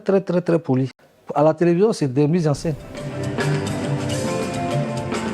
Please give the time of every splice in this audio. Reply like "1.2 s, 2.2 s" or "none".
1.0 s, 3.2 s